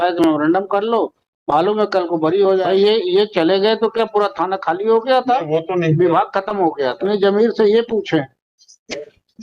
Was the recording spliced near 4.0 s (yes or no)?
no